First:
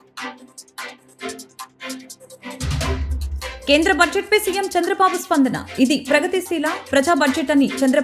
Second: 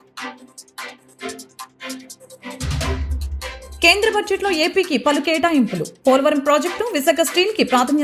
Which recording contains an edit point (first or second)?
first